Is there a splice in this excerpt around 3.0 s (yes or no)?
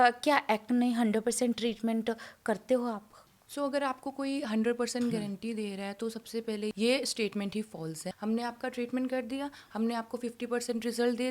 no